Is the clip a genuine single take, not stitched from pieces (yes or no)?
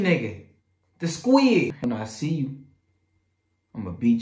no